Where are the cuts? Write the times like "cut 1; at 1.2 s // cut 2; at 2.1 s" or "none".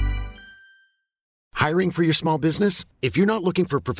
cut 1; at 1.5 s